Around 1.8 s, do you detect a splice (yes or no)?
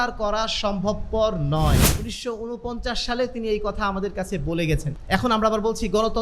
yes